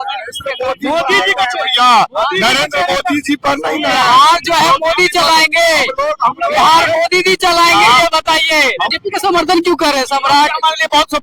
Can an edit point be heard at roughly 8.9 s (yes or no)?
yes